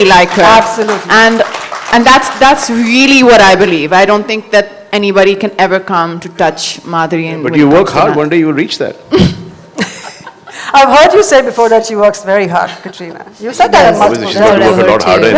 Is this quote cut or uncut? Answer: uncut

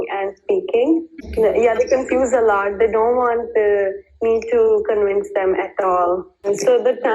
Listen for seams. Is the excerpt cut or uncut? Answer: cut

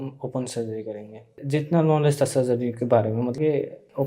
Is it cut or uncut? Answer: cut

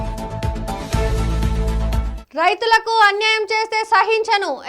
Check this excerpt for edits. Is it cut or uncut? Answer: cut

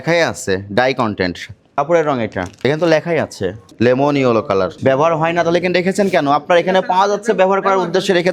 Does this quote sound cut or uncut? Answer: uncut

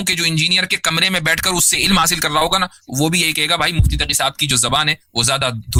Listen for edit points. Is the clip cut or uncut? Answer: uncut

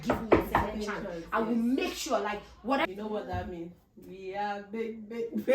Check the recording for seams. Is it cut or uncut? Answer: cut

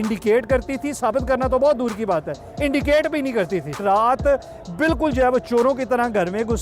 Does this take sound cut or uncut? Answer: cut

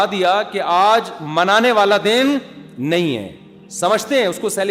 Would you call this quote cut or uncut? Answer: uncut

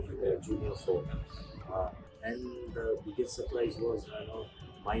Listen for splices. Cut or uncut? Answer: cut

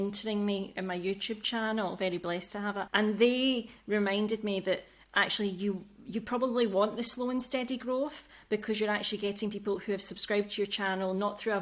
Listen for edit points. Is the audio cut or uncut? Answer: cut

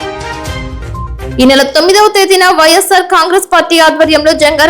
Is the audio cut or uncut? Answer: cut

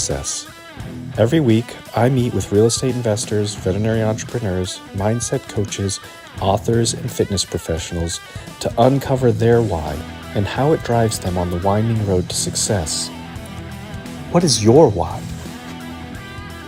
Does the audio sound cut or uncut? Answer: uncut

